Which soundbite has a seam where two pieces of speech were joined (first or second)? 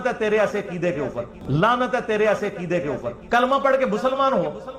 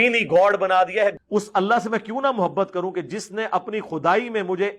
second